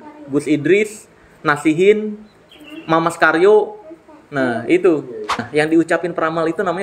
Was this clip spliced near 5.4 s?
yes; 1 cut; at 5.4 s

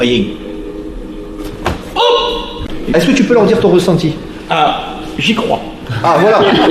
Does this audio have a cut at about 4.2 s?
no; 1 cut; at 2.7 s

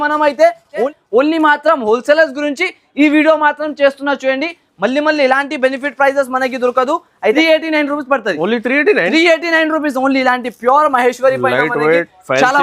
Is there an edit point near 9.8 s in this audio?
no; 2 cuts; at 0.9 s, 7.4 s

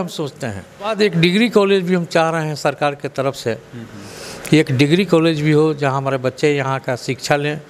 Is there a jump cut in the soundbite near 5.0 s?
no; 1 cut; at 0.9 s

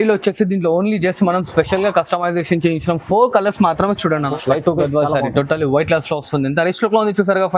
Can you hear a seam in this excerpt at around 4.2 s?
yes; 1 cut; at 4.2 s

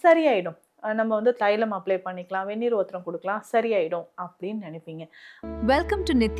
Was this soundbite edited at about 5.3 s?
yes; 1 cut; at 5.3 s

